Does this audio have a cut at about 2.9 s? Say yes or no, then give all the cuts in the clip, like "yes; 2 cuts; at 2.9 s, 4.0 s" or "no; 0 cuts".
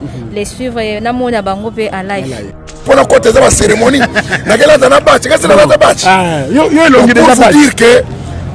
yes; 1 cut; at 2.9 s